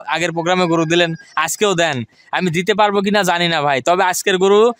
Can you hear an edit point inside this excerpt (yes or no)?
no